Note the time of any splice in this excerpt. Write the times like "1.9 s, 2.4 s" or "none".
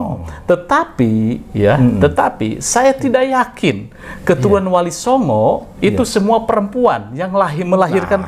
none